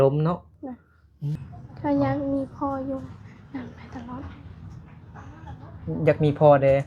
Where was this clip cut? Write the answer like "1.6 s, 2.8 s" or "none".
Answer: 1.4 s